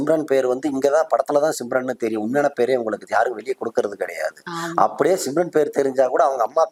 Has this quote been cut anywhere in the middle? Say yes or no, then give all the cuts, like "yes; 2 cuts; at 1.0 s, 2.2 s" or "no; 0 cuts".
no; 0 cuts